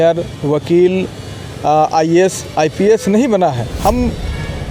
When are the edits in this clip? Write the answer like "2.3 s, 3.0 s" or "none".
3.7 s